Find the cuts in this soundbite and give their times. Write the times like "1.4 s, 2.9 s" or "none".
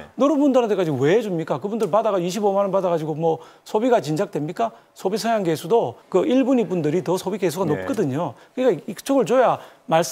6.0 s